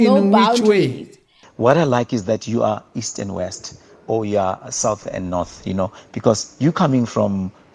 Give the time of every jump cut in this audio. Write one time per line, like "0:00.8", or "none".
0:01.4

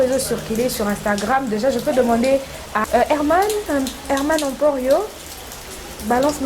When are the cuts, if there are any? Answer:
0:02.8

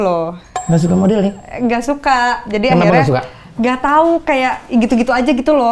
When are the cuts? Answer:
none

